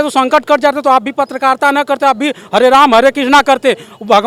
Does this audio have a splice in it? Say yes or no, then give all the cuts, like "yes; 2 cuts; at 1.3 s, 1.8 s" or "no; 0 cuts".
no; 0 cuts